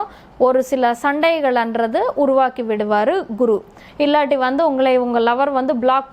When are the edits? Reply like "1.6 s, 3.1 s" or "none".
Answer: 3.8 s